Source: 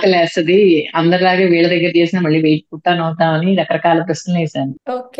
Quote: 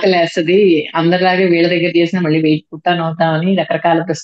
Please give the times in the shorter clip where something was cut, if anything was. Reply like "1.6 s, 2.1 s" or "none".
none